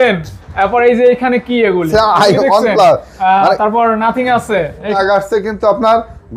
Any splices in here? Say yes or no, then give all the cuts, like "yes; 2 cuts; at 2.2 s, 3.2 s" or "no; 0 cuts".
yes; 1 cut; at 5.0 s